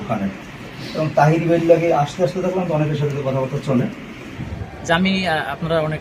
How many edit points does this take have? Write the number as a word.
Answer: one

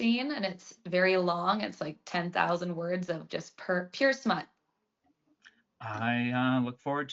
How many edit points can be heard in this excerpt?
zero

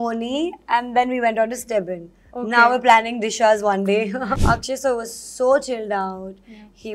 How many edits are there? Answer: one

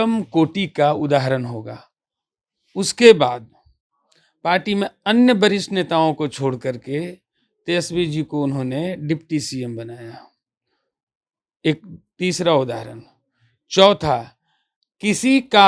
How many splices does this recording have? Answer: zero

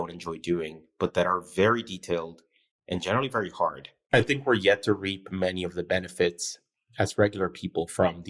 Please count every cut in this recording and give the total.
one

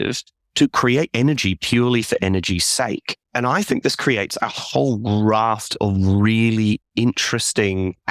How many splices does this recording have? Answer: zero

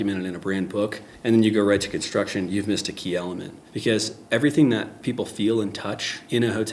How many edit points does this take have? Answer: one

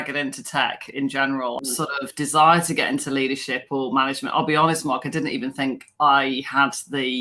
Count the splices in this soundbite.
one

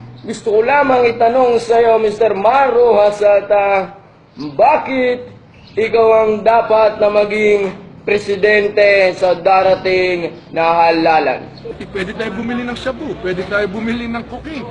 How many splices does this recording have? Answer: one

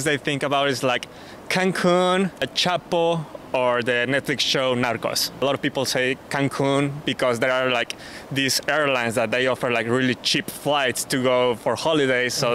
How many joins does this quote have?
zero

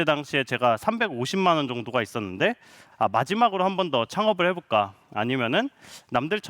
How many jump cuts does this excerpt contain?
one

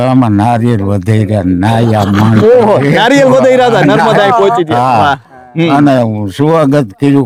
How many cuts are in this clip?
zero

